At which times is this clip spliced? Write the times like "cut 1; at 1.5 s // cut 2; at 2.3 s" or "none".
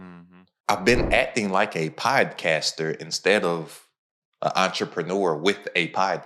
none